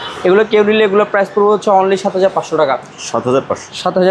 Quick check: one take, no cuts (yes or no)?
yes